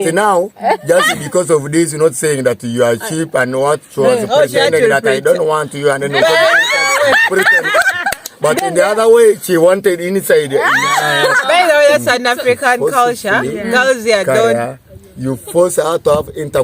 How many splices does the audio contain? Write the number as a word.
one